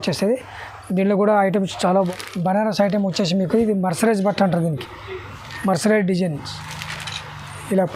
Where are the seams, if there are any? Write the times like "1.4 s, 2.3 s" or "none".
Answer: 2.1 s

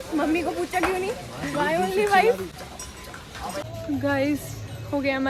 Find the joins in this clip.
none

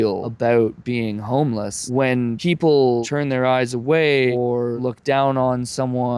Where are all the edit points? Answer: none

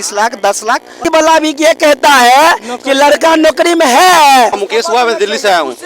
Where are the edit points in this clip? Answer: 1.1 s, 4.6 s

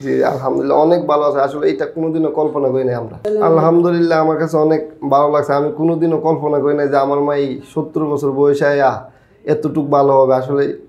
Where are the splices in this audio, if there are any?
3.1 s

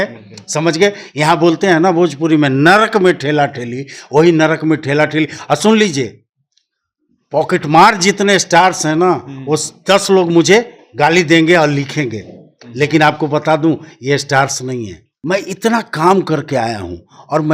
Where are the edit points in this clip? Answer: 15.1 s

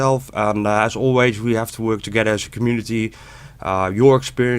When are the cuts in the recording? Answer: 3.4 s

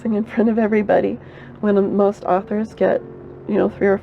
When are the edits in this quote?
none

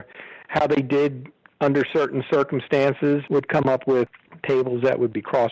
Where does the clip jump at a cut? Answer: 3.2 s, 4.1 s

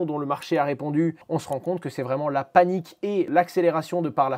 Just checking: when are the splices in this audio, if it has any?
1.2 s, 3.3 s

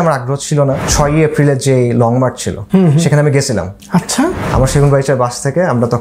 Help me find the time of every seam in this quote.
0.9 s, 2.5 s, 3.8 s

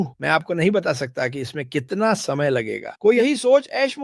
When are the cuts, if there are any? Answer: 2.8 s

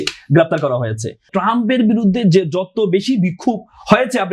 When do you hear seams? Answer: 1.2 s

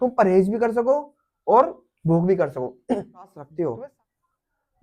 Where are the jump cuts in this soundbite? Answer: 3.4 s

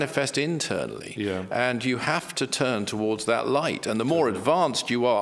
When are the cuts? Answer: none

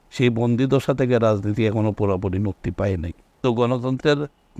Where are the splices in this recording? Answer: 3.4 s

